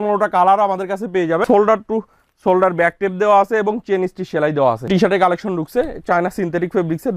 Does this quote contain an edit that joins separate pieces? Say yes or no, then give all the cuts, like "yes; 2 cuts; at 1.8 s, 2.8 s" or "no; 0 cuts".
yes; 2 cuts; at 1.4 s, 4.8 s